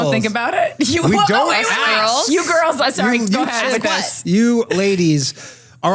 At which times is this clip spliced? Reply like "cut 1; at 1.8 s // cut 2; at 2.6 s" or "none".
none